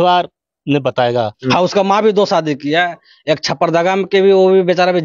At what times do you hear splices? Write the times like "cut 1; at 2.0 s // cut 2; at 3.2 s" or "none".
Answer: cut 1; at 1.4 s